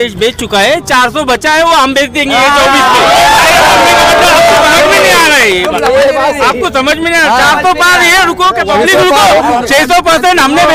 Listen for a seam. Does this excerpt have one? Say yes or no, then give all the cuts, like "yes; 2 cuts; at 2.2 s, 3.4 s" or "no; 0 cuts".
no; 0 cuts